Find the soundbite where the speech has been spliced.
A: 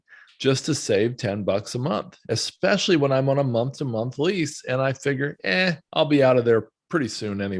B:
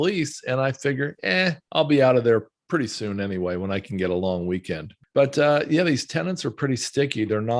B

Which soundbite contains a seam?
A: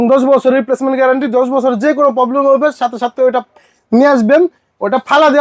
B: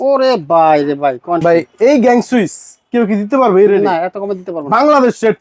B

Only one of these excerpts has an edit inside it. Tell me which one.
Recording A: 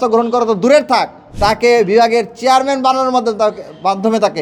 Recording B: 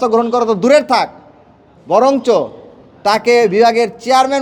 A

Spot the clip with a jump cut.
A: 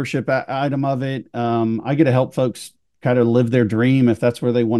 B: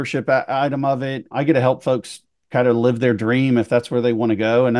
B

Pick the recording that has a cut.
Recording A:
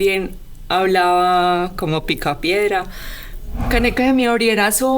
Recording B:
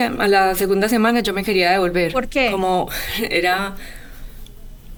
A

